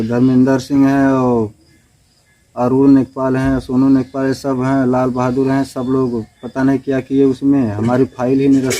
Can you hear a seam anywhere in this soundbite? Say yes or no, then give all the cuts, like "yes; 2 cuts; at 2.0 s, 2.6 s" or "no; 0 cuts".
no; 0 cuts